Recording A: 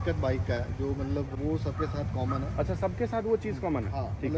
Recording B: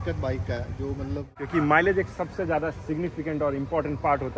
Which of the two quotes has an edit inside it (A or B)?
B